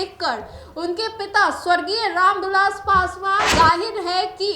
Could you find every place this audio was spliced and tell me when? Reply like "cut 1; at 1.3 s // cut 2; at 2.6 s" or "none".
cut 1; at 3.5 s